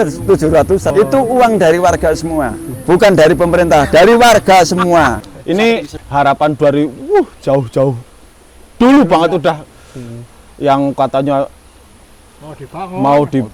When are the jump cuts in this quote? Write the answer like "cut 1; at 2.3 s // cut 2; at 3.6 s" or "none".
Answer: cut 1; at 0.9 s // cut 2; at 2.7 s // cut 3; at 5.6 s